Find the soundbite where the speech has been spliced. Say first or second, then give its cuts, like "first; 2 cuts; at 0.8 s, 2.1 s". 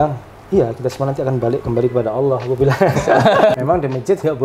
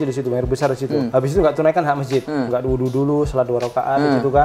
first; 1 cut; at 3.5 s